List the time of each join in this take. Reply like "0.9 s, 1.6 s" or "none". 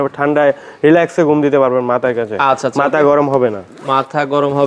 none